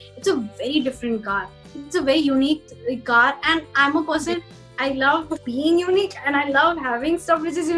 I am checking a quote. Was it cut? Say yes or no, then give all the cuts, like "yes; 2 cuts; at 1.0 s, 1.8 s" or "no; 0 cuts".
no; 0 cuts